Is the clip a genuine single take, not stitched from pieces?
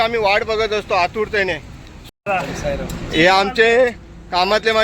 no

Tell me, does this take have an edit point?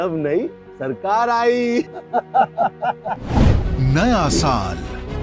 yes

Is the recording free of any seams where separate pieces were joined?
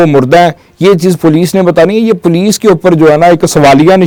yes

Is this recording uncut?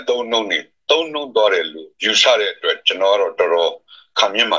yes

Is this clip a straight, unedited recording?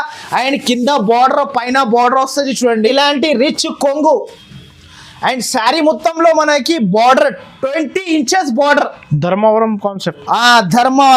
no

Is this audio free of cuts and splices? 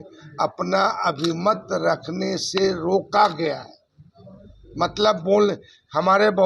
yes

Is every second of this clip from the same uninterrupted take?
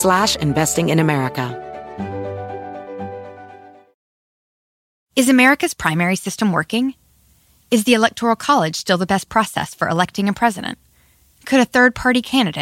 no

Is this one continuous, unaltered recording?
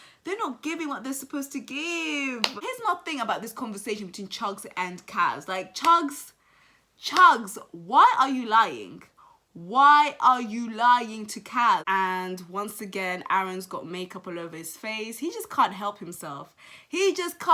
no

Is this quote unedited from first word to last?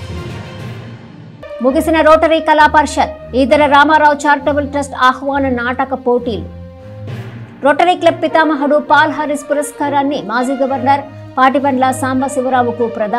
no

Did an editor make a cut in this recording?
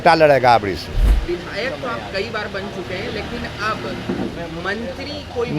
yes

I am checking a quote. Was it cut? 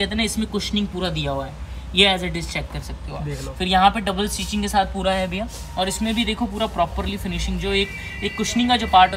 no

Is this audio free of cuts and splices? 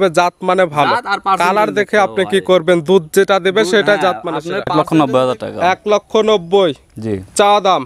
no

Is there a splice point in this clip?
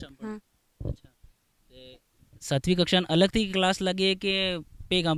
no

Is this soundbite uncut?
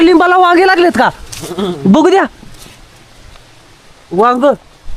yes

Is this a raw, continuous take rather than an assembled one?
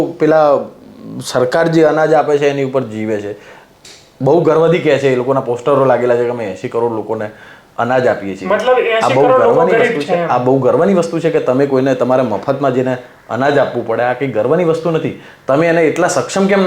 yes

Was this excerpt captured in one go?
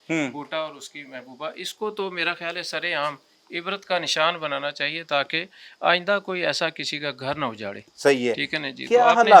yes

